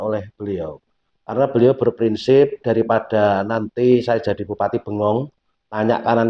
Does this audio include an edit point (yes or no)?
no